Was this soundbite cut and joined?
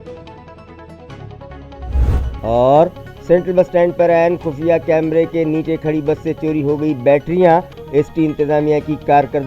yes; 1 cut; at 2.4 s

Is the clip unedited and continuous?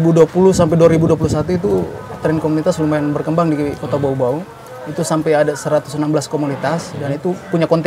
yes; 0 cuts

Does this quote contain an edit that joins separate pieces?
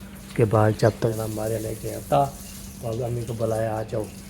yes; 1 cut; at 1.1 s

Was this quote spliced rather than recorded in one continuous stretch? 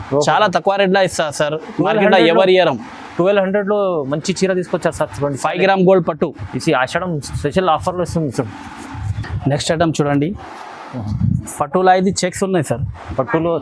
no; 0 cuts

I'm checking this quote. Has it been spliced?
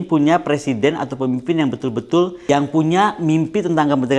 yes; 1 cut; at 2.4 s

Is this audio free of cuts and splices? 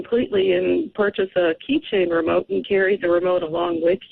yes; 0 cuts

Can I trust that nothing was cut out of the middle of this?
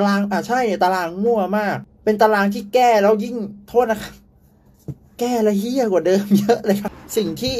yes; 0 cuts

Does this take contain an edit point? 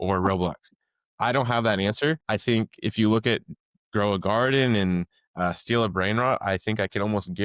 yes; 1 cut; at 2.2 s

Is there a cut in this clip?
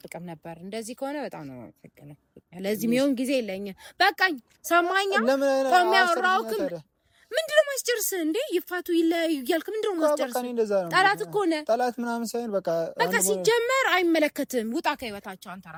no; 0 cuts

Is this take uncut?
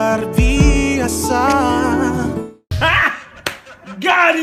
yes; 0 cuts

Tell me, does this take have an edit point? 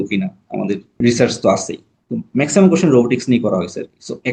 yes; 1 cut; at 1.0 s

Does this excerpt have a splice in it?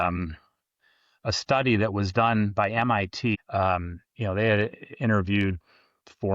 yes; 1 cut; at 3.4 s

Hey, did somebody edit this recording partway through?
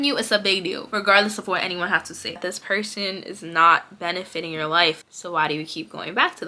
yes; 2 cuts; at 2.4 s, 5.1 s

